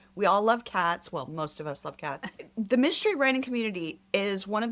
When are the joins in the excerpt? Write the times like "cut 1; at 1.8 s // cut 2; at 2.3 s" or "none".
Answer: none